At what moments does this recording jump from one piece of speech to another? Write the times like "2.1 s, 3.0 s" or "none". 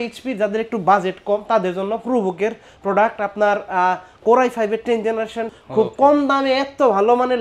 5.5 s